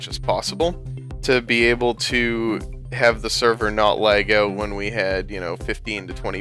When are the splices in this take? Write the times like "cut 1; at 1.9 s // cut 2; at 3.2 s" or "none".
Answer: cut 1; at 5.4 s